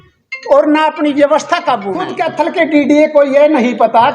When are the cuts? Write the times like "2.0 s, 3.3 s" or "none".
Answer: 2.2 s